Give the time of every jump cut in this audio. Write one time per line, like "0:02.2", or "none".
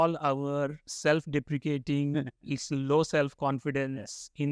none